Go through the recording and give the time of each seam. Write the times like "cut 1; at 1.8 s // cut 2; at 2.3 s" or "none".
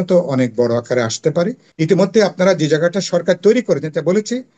cut 1; at 1.7 s